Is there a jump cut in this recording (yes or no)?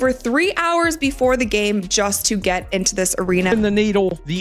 yes